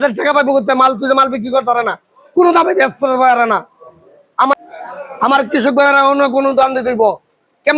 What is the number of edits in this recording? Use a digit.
1